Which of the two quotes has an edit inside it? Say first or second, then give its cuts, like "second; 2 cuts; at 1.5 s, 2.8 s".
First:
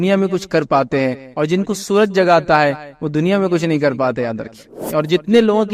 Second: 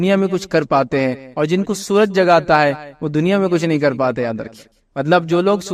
first; 1 cut; at 4.8 s